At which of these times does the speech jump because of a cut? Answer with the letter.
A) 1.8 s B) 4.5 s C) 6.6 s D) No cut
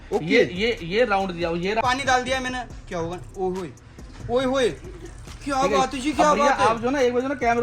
A